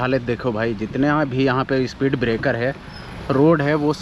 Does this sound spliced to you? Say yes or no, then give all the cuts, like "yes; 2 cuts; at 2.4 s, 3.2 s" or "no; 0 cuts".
no; 0 cuts